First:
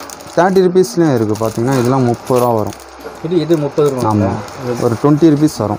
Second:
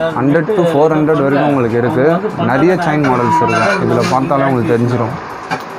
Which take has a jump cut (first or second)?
first